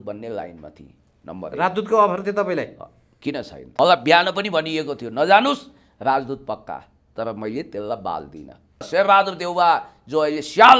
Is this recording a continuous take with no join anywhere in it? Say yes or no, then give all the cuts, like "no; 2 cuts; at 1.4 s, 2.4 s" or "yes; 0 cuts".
no; 2 cuts; at 3.6 s, 8.9 s